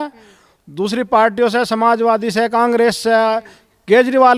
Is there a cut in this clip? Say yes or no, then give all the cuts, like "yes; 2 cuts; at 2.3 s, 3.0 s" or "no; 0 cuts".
no; 0 cuts